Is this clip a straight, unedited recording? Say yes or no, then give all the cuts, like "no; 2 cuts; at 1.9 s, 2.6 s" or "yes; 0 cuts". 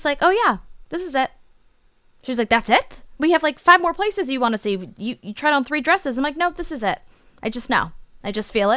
no; 1 cut; at 3.2 s